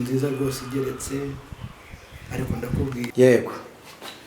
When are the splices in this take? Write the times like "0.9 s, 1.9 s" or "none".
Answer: 3.0 s